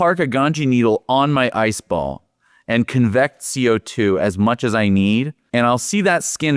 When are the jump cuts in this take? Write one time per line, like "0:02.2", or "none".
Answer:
0:05.4